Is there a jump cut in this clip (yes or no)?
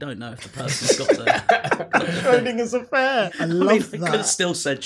yes